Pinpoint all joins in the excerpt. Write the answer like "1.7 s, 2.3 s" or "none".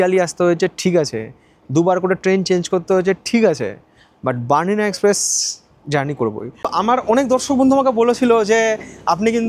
6.7 s